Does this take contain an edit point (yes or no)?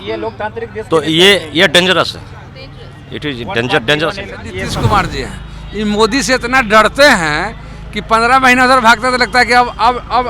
yes